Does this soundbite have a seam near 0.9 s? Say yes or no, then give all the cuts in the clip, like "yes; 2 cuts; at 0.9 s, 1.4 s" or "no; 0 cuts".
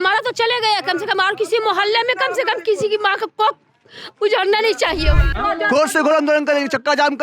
no; 1 cut; at 5.3 s